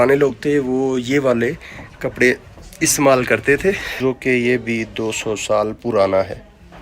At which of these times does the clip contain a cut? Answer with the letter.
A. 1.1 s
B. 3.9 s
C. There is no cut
B